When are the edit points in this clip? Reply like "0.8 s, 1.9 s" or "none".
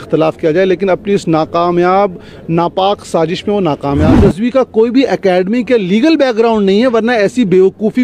4.1 s